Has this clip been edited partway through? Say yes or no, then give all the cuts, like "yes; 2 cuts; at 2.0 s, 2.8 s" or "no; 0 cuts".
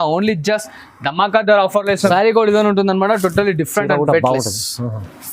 yes; 1 cut; at 2.1 s